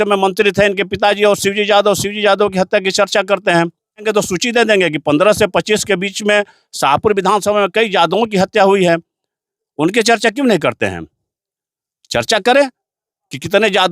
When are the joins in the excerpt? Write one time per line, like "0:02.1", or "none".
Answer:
0:04.0